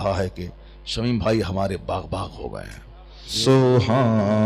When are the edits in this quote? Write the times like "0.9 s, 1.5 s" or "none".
3.4 s